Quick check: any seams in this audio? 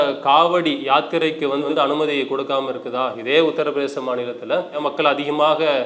yes; 2 cuts; at 1.7 s, 4.8 s

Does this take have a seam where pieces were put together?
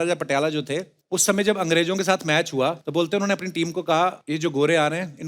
yes; 3 cuts; at 0.9 s, 2.8 s, 4.2 s

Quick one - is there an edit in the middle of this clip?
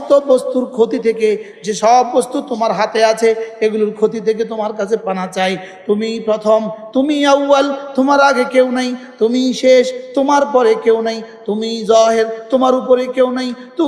no; 0 cuts

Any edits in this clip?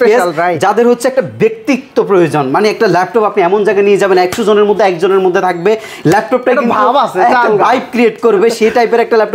no; 0 cuts

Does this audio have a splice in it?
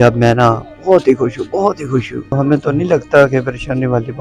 yes; 1 cut; at 2.3 s

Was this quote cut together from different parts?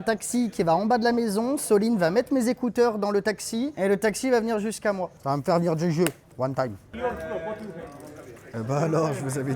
yes; 3 cuts; at 5.1 s, 6.9 s, 8.4 s

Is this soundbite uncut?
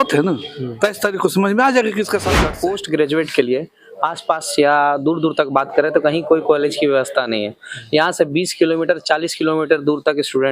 no; 1 cut; at 2.3 s

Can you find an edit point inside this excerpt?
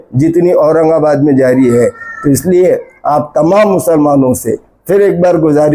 no; 0 cuts

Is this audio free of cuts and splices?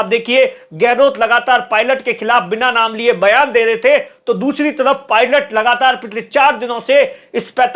yes; 0 cuts

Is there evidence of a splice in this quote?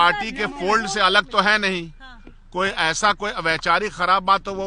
no; 0 cuts

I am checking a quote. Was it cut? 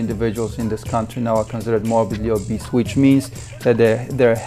no; 0 cuts

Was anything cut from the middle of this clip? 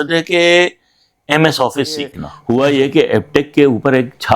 yes; 1 cut; at 2.3 s

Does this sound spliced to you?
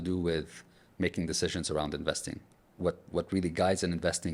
yes; 1 cut; at 2.5 s

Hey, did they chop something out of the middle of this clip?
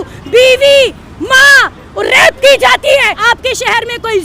yes; 1 cut; at 3.1 s

